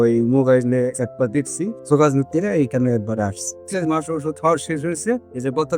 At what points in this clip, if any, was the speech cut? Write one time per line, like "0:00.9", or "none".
0:01.8
0:03.6